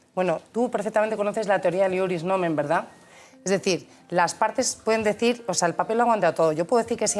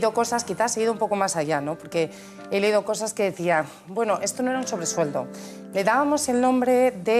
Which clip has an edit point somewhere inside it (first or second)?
second